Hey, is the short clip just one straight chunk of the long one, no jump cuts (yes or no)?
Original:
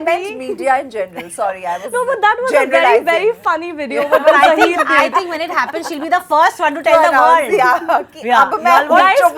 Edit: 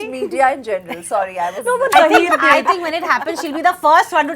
no